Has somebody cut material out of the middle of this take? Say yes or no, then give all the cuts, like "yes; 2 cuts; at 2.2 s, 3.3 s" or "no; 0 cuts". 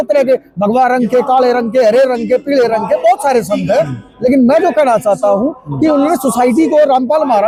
no; 0 cuts